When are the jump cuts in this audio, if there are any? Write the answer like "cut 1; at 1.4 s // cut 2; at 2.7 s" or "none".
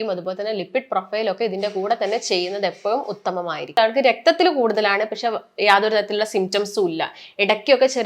cut 1; at 3.7 s